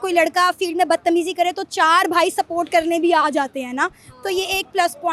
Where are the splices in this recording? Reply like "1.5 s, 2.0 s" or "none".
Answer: none